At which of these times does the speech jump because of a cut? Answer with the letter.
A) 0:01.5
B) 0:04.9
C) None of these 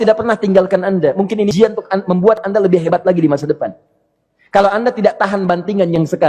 A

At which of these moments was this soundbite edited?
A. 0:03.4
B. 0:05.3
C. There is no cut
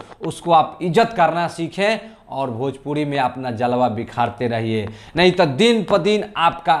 C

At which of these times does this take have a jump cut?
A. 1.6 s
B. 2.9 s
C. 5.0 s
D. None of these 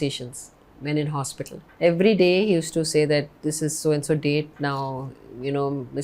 A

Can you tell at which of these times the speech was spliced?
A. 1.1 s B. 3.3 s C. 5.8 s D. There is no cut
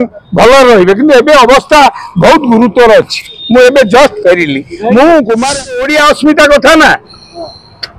C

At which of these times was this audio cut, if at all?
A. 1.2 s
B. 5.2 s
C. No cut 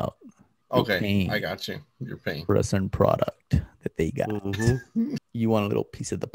B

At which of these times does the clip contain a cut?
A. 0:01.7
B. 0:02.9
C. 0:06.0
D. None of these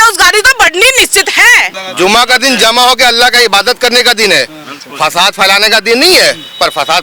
A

